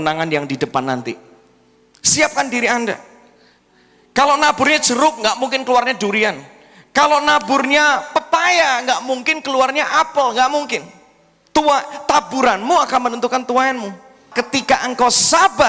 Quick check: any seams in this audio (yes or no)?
yes